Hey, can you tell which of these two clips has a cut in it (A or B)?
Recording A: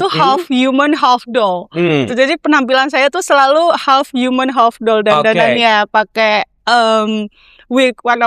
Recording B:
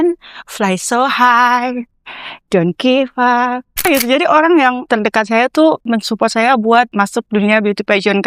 B